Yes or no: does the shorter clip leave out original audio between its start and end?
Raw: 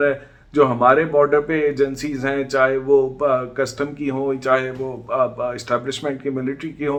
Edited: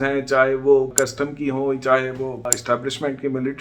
yes